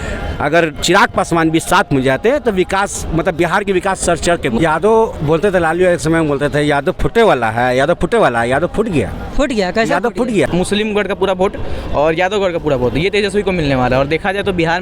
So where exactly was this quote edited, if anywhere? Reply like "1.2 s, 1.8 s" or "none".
4.6 s, 10.5 s